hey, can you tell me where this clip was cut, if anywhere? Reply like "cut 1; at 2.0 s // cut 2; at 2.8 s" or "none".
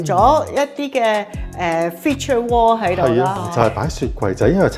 cut 1; at 3.4 s